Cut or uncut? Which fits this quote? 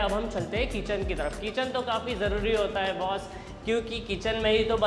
uncut